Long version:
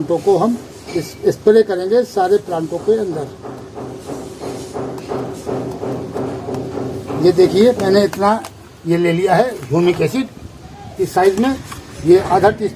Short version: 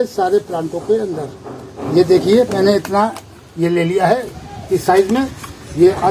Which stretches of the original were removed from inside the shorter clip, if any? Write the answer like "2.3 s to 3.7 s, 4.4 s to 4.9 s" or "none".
3.7 s to 7.0 s, 9.6 s to 10.6 s

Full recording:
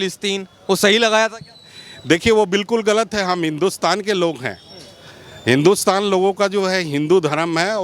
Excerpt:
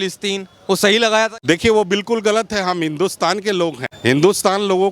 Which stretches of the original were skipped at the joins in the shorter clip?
1.4 s to 2.0 s, 4.5 s to 5.3 s

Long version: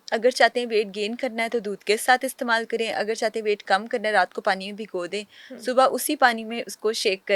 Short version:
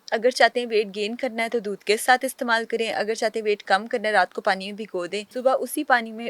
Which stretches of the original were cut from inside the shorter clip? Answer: 5.2 s to 5.6 s

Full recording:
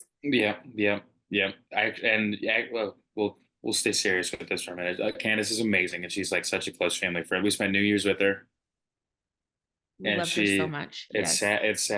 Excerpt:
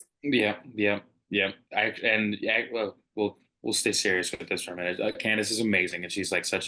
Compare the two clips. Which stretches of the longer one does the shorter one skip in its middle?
none

